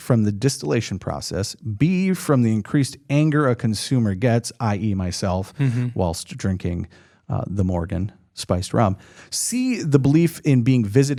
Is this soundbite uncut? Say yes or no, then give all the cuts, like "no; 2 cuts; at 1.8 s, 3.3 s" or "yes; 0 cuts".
yes; 0 cuts